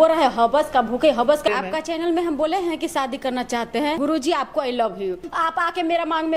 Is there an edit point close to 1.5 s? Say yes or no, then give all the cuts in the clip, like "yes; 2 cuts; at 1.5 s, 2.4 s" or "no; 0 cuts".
yes; 3 cuts; at 1.5 s, 4.0 s, 5.3 s